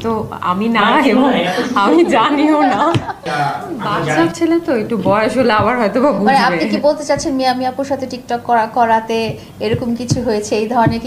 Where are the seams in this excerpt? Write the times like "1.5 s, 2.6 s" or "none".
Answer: 3.3 s